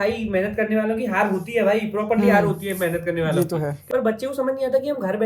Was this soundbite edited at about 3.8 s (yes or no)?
yes